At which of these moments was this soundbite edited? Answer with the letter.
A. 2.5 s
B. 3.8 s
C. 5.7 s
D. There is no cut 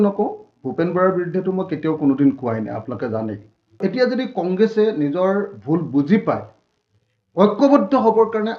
B